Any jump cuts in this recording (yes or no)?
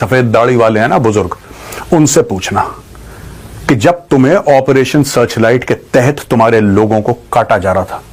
no